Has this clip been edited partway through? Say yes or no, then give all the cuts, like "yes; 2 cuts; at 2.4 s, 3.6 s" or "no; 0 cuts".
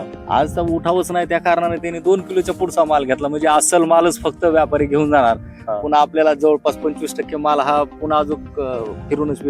no; 0 cuts